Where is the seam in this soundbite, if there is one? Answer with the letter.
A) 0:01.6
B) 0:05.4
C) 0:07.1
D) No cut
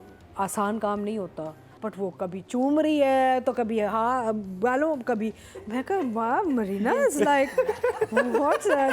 A